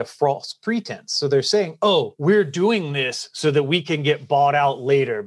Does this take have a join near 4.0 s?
no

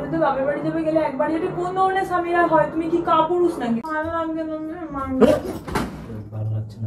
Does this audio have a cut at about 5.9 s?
no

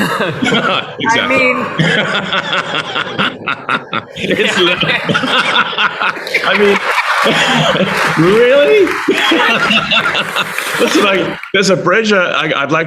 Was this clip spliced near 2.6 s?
no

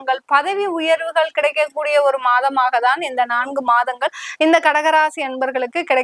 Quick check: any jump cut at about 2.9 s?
no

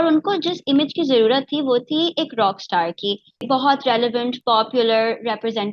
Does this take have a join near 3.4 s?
yes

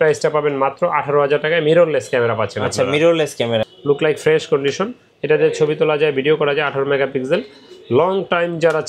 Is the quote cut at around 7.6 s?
no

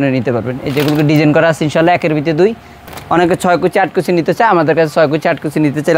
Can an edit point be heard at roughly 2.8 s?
yes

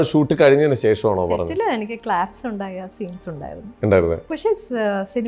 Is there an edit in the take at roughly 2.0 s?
no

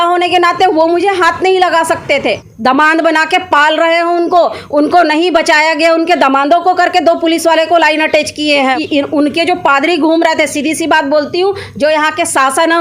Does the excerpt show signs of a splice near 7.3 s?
no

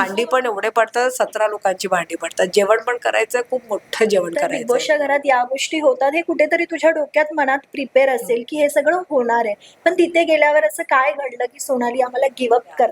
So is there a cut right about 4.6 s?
yes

